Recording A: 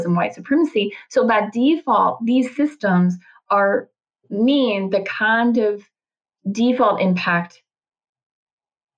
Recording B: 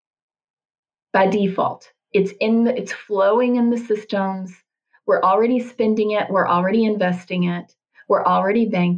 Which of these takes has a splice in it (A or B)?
A